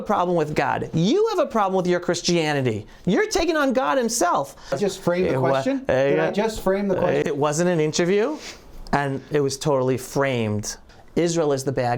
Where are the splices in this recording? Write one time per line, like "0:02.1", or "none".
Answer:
0:04.8
0:07.2
0:10.9